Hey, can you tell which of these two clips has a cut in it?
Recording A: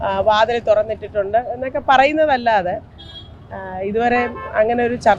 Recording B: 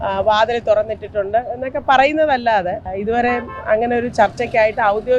B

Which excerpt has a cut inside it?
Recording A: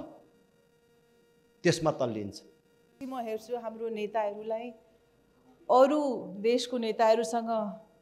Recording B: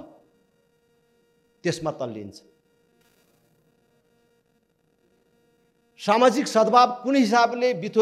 A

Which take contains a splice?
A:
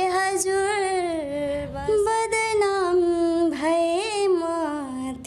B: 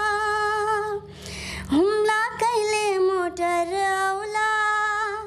A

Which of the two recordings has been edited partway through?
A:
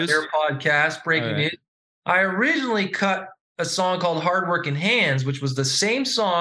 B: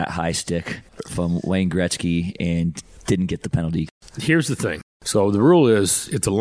B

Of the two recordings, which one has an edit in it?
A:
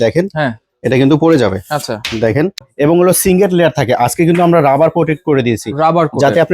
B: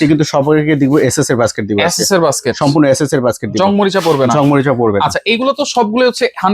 A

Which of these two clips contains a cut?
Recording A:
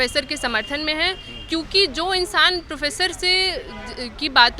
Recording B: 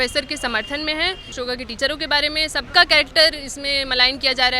B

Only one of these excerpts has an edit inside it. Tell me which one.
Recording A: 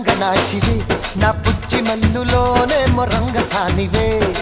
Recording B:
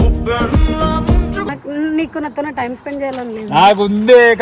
B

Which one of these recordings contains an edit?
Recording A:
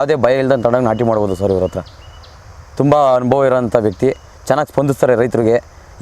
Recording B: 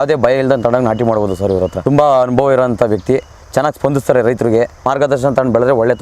B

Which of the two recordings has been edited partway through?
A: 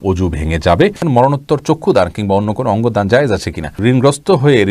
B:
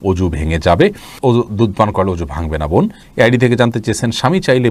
A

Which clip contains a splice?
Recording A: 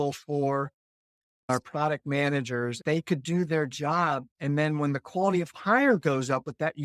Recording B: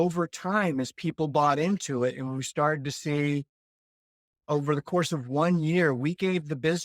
A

